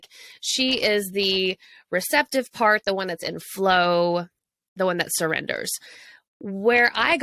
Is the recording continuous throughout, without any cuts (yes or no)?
yes